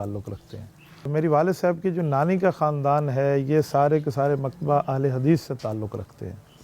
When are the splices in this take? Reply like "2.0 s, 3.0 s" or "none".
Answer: 1.1 s